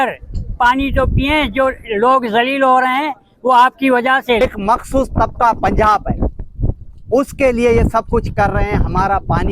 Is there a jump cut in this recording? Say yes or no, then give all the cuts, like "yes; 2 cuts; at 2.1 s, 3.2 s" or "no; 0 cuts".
yes; 1 cut; at 4.4 s